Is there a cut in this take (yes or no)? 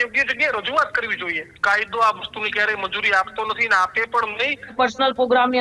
yes